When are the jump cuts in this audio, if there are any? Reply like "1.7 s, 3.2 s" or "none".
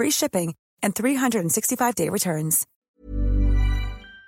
2.7 s